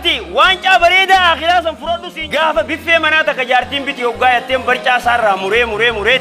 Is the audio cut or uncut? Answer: cut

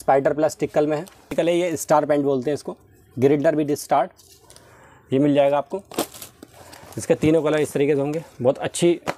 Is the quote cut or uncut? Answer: cut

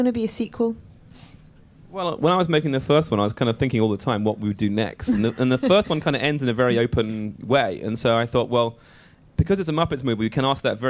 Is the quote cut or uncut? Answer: cut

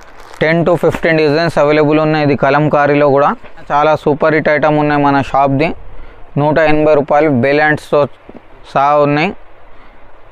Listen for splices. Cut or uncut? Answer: cut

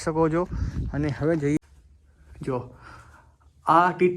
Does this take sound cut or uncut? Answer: cut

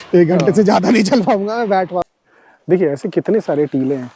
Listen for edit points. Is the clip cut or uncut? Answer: cut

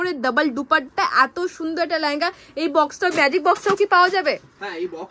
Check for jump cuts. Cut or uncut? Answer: uncut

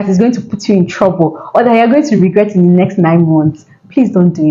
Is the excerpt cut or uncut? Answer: uncut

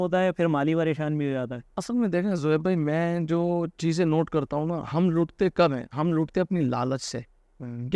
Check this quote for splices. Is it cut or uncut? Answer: uncut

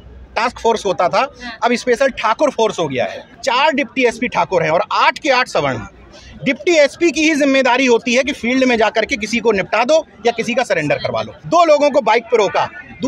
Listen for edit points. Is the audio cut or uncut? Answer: cut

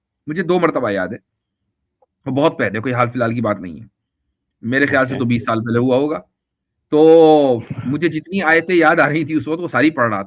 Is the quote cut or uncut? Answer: uncut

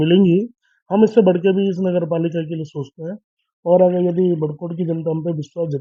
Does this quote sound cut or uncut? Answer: uncut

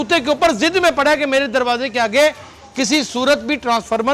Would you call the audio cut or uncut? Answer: uncut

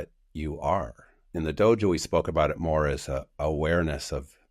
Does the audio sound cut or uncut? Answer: cut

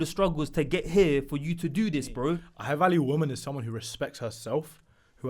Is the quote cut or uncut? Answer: cut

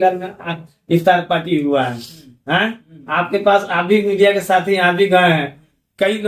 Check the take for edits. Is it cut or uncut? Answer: uncut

